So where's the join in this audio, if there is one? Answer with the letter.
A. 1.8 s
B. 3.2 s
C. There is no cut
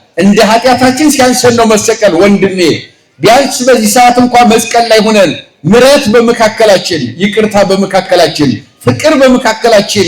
C